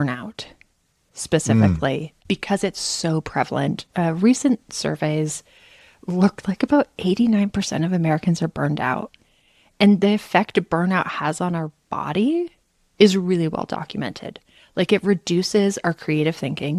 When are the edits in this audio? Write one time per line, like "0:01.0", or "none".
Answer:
none